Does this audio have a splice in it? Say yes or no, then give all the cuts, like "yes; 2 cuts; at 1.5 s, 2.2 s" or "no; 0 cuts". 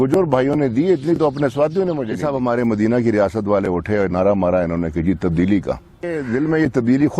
yes; 2 cuts; at 2.2 s, 6.2 s